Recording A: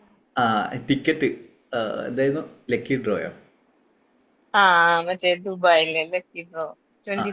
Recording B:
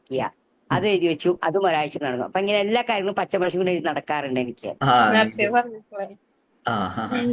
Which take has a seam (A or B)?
B